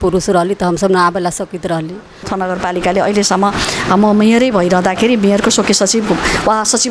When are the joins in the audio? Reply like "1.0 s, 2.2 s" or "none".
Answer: 2.3 s